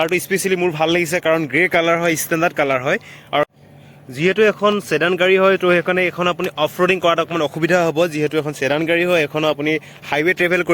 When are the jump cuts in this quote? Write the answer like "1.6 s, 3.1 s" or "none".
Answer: 3.5 s